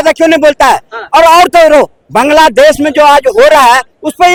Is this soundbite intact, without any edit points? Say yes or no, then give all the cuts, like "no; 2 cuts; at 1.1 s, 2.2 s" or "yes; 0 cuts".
yes; 0 cuts